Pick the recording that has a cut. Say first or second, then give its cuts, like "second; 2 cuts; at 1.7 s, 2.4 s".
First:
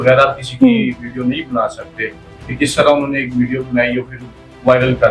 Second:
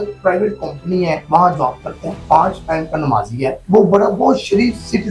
second; 3 cuts; at 1.2 s, 2.1 s, 3.6 s